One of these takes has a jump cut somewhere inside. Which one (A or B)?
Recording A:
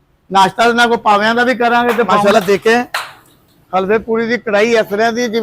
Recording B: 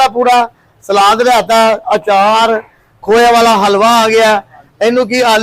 A